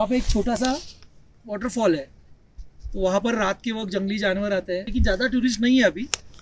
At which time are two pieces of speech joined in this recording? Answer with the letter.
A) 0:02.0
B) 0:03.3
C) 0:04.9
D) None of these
C